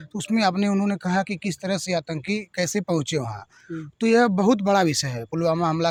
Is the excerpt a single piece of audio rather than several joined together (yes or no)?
yes